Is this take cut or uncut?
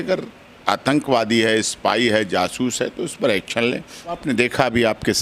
cut